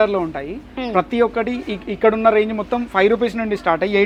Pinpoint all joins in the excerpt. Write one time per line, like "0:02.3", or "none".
none